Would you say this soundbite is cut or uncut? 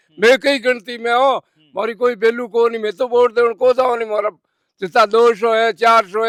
uncut